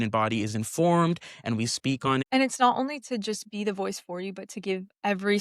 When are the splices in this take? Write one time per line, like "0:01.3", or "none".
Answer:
0:02.2